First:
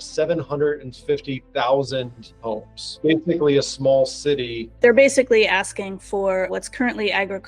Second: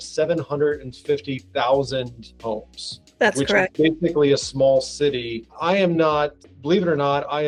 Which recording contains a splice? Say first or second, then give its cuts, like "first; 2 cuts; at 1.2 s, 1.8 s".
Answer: first; 3 cuts; at 3.0 s, 4.6 s, 6.5 s